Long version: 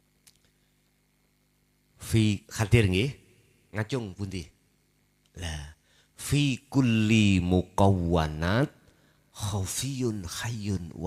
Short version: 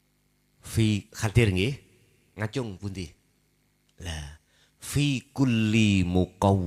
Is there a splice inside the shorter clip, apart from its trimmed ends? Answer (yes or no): no